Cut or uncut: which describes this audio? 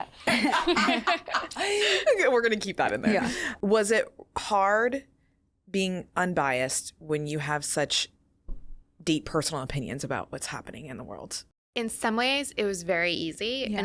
cut